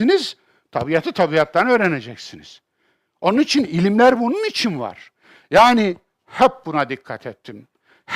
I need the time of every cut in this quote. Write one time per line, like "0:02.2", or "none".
0:04.4

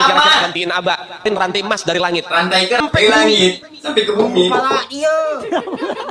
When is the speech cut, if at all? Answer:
0:01.2
0:02.8

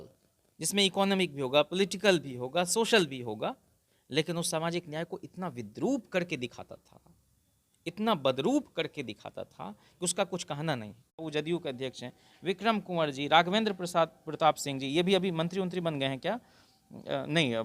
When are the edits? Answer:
0:11.2

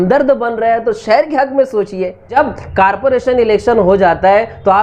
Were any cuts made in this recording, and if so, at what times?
0:02.4

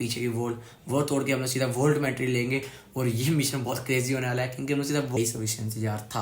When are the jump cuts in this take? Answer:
0:05.1

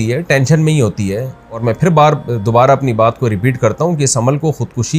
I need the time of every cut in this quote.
0:01.6

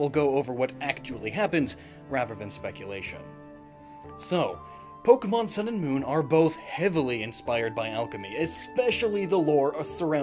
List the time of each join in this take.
0:06.0

